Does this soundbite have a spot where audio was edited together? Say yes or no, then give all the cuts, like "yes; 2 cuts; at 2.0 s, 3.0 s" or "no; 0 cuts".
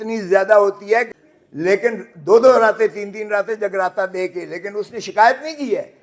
yes; 1 cut; at 1.2 s